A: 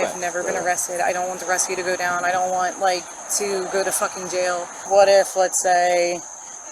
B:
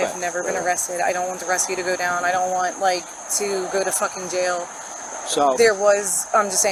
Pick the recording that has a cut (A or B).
A